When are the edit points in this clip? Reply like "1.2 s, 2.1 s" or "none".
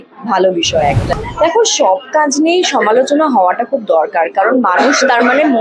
1.1 s